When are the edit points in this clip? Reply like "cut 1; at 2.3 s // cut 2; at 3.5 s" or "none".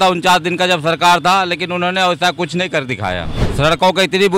cut 1; at 3.4 s